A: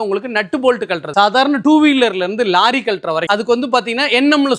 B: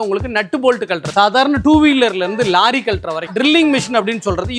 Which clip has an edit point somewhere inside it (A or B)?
B